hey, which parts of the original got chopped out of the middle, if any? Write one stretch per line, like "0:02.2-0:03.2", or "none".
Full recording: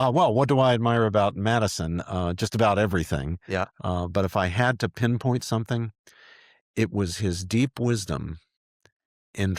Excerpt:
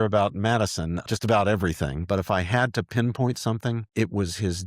0:02.1-0:02.4
0:03.3-0:04.1
0:05.9-0:06.7